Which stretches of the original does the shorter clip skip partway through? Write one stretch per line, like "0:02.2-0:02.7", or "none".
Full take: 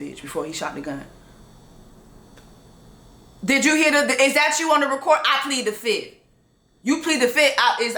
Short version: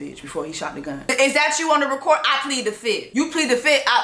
0:01.1-0:04.1
0:06.1-0:06.8